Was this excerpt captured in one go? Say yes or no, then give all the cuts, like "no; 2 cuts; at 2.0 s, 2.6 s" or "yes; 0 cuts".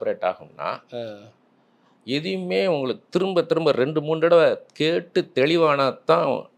yes; 0 cuts